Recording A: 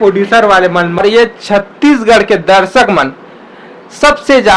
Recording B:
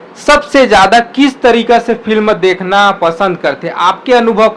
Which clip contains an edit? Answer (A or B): A